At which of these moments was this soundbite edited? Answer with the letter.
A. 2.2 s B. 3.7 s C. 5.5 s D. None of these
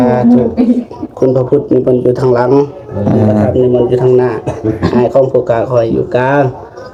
D